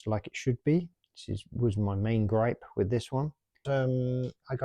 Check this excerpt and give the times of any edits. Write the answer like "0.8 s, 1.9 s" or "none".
3.6 s